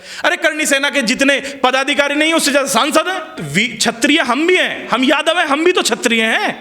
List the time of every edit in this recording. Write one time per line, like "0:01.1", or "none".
0:03.4